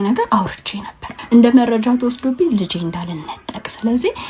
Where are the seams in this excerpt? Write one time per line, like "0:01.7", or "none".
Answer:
0:01.0